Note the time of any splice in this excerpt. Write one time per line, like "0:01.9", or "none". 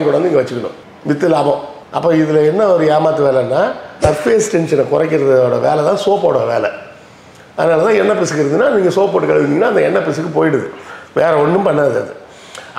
0:04.0

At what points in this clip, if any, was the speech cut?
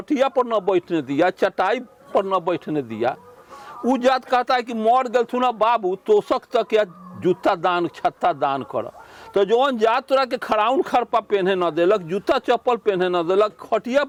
none

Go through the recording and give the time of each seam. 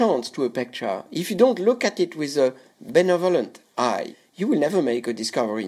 0:02.7
0:04.1

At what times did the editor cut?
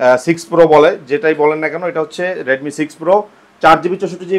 none

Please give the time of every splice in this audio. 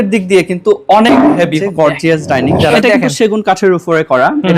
0:01.6
0:02.8

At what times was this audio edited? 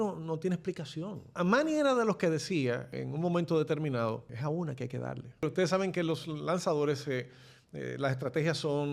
0:01.4
0:03.0
0:04.3
0:05.4

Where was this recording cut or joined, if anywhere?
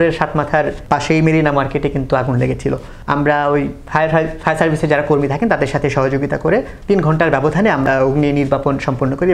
0:00.8
0:02.9
0:06.7
0:07.8

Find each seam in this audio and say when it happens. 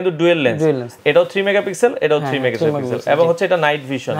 0:00.9

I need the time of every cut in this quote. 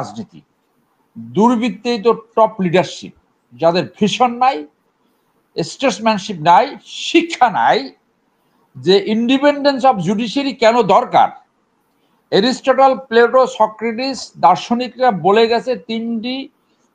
none

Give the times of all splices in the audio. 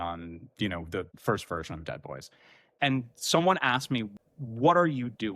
0:01.1
0:02.7
0:04.1

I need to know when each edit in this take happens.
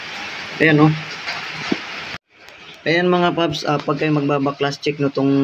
0:02.2

